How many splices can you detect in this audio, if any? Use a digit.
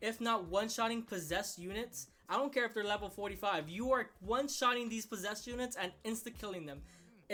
0